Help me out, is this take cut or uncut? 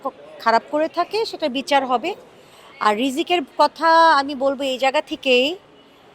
uncut